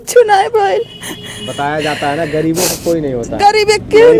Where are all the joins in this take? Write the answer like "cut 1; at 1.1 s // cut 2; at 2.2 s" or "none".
none